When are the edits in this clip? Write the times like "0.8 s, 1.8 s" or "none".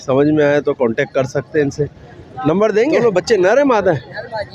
3.0 s